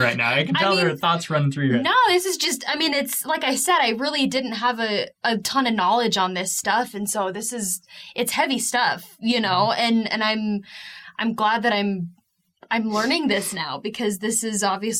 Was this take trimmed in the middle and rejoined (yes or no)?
no